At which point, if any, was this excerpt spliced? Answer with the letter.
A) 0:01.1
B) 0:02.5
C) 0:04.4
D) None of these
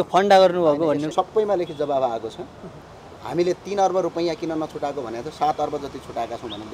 A